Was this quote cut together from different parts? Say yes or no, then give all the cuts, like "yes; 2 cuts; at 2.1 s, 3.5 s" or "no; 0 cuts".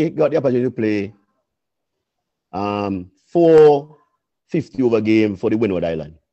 no; 0 cuts